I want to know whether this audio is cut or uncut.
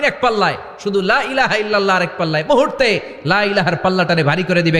uncut